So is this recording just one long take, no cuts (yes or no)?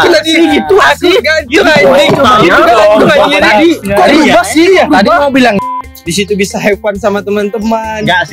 no